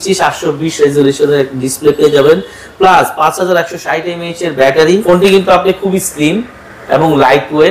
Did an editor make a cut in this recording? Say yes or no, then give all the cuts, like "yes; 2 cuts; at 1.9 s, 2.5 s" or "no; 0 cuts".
yes; 1 cut; at 5.0 s